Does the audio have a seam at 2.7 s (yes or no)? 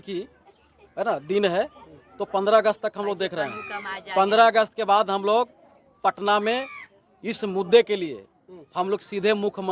no